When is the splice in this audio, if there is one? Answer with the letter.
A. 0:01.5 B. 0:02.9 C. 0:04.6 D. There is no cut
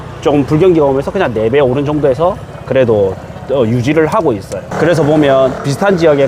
C